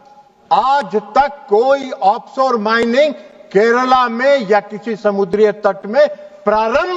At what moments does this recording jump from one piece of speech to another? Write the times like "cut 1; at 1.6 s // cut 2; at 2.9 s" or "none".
none